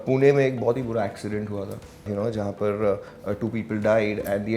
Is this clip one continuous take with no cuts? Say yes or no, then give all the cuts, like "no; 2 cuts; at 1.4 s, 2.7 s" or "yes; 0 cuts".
no; 1 cut; at 2.1 s